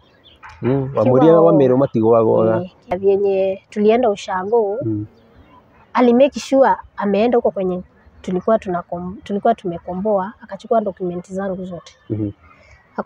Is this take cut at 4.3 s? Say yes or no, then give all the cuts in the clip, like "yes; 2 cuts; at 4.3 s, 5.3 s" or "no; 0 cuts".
no; 1 cut; at 2.9 s